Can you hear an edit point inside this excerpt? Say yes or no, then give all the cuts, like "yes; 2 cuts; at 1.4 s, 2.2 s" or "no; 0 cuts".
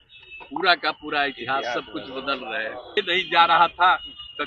yes; 1 cut; at 3.0 s